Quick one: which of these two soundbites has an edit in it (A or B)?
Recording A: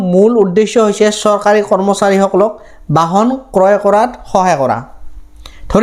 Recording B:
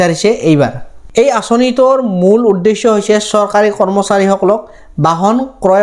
B